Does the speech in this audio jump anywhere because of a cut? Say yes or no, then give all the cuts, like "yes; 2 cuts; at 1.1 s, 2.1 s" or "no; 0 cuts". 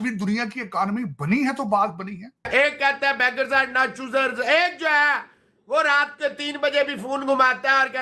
yes; 1 cut; at 2.5 s